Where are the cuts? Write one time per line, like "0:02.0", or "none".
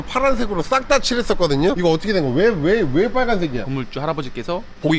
0:01.8
0:03.7

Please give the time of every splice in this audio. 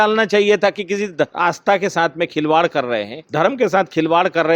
0:01.3
0:03.2

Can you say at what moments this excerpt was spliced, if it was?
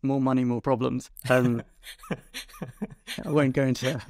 0:01.1

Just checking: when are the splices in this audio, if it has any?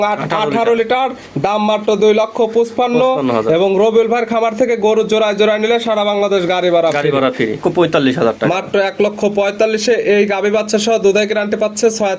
0:07.6

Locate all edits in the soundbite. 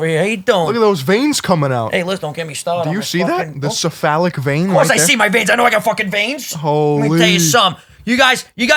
none

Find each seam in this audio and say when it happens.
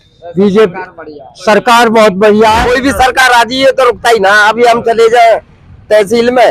0:02.6

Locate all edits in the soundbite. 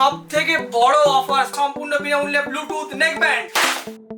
0:01.5

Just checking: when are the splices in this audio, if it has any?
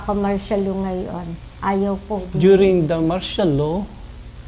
0:02.3

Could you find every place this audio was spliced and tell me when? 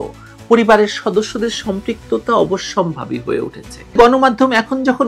0:04.0

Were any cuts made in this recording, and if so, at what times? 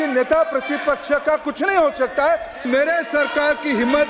0:02.6

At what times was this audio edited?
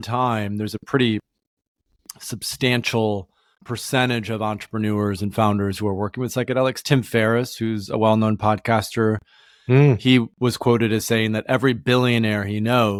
none

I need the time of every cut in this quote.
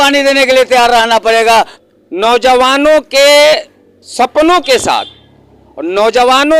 0:01.8

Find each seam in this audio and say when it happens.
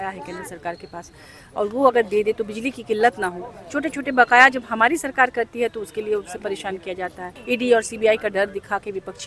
0:07.3

